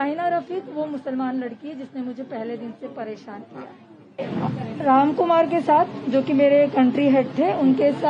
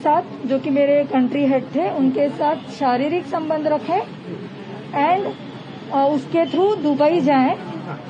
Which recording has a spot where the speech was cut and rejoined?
first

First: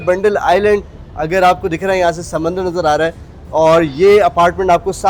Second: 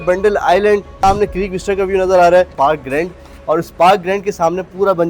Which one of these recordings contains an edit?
second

